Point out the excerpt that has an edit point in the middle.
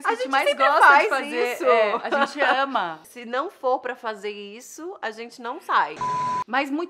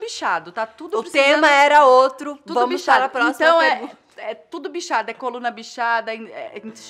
first; 1 cut; at 6.0 s

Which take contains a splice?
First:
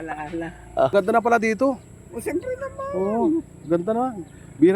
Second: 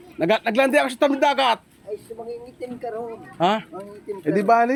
first; 1 cut; at 0.9 s

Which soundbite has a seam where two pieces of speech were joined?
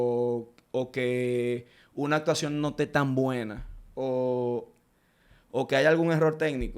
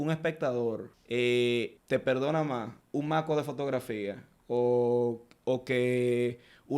second; 3 cuts; at 0.9 s, 1.8 s, 2.8 s

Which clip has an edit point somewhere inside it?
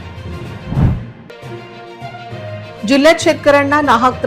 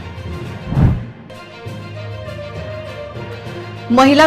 second; 2 cuts; at 1.2 s, 2.7 s

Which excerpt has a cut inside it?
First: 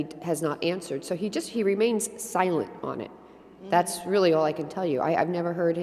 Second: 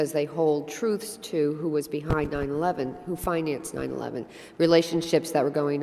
second; 1 cut; at 3.3 s

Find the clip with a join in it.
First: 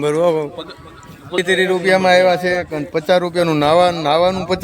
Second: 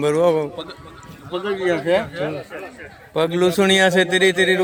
first; 1 cut; at 1.4 s

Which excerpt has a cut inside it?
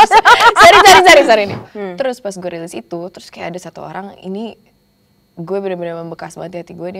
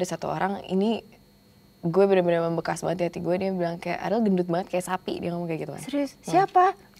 first; 1 cut; at 1.7 s

